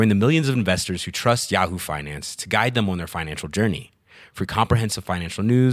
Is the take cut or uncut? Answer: uncut